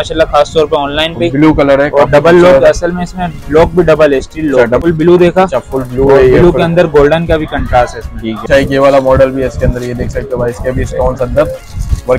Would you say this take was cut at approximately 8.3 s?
yes; 2 cuts; at 4.8 s, 8.3 s

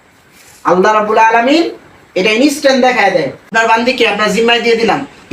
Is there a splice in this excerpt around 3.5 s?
yes; 1 cut; at 3.5 s

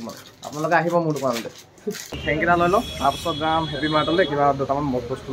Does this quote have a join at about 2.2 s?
yes; 1 cut; at 2.2 s

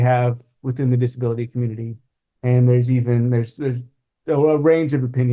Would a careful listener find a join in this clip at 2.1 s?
no; 0 cuts

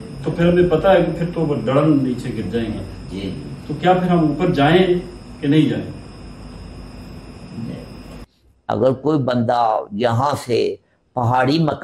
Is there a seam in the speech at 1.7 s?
no; 1 cut; at 8.2 s

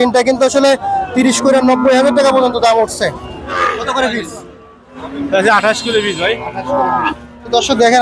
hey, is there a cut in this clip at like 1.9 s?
no; 1 cut; at 3.6 s

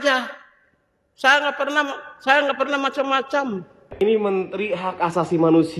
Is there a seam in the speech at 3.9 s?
yes; 1 cut; at 3.9 s

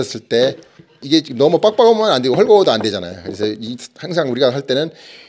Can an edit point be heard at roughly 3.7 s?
no; 1 cut; at 1.0 s

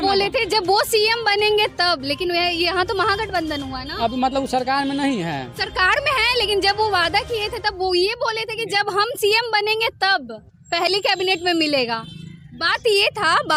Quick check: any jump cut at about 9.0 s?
no; 0 cuts

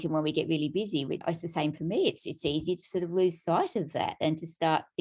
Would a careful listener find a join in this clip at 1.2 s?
yes; 1 cut; at 1.2 s

